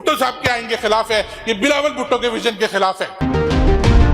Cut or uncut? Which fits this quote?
cut